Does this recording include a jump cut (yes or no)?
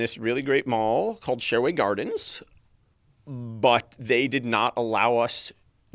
no